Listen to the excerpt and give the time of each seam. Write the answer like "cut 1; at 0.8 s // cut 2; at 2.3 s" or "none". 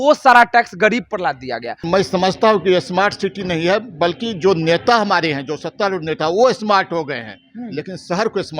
cut 1; at 1.8 s